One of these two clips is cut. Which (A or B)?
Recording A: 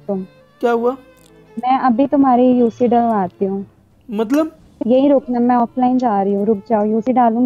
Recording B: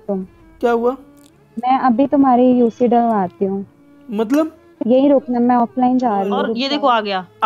B